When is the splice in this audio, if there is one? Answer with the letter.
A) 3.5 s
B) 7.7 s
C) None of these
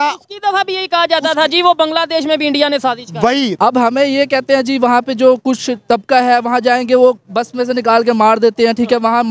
A